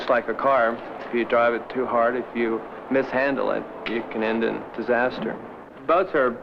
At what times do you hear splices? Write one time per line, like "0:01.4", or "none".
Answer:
0:04.3

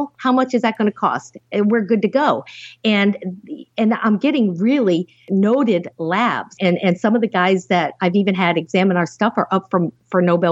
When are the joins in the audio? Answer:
0:06.5

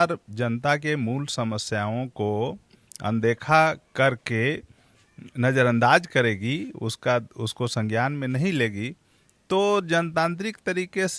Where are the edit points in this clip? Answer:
none

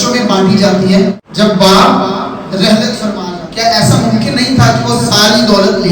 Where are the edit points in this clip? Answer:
0:01.2
0:03.2

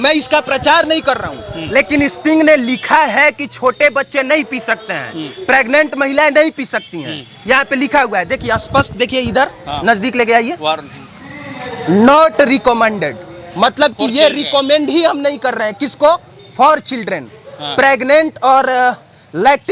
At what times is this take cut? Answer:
none

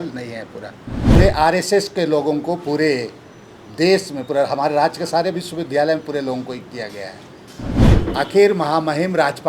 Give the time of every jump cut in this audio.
0:01.1
0:07.8

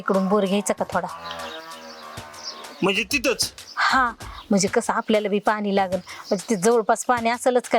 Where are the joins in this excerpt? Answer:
none

